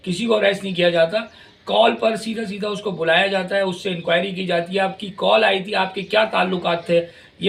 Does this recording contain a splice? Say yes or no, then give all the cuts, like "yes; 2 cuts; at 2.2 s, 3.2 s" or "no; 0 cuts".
no; 0 cuts